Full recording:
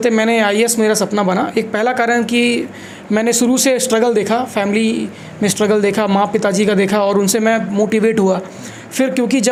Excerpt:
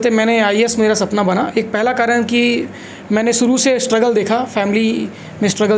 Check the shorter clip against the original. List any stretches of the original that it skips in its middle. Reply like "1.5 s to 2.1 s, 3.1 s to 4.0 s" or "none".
none